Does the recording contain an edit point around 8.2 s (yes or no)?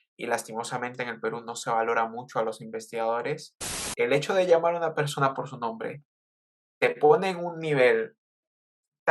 no